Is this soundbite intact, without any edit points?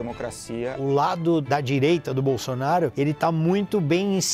no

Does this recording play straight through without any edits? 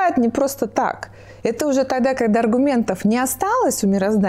yes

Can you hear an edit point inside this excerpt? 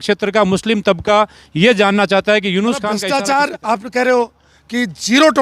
yes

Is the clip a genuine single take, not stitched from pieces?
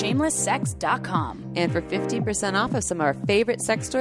yes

